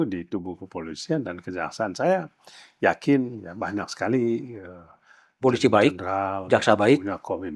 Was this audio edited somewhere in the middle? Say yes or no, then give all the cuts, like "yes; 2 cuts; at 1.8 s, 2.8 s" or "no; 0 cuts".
no; 0 cuts